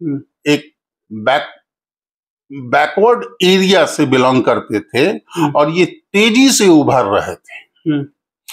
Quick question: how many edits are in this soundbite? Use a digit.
0